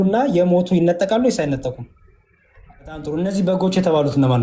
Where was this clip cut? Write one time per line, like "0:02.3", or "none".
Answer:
0:03.0